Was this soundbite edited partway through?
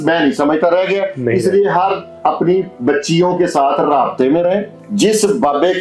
yes; 1 cut; at 4.8 s

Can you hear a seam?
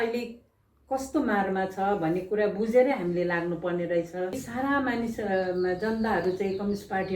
yes; 1 cut; at 4.4 s

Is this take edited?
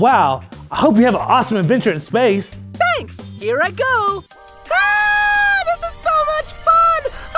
yes; 1 cut; at 4.2 s

